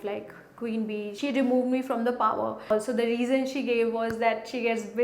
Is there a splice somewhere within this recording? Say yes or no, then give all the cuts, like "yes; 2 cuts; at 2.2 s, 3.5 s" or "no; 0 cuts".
yes; 2 cuts; at 1.1 s, 2.7 s